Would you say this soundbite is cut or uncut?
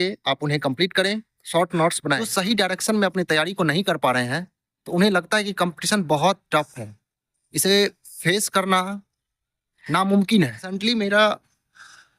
cut